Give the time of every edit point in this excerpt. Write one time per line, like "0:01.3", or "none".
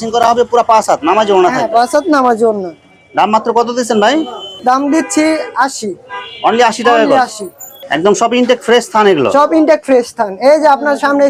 none